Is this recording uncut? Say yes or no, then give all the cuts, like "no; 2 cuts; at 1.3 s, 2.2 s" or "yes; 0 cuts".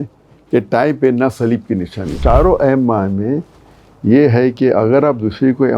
no; 1 cut; at 2.2 s